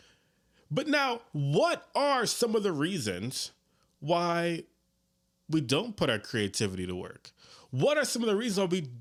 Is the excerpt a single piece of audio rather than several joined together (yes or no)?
yes